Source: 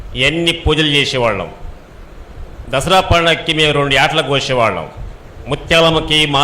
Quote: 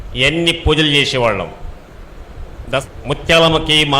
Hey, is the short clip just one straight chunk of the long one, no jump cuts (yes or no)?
no